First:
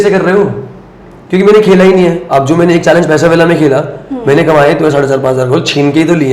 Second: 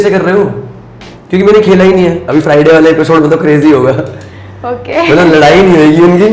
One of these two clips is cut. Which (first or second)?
second